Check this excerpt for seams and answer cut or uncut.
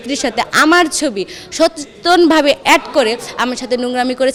uncut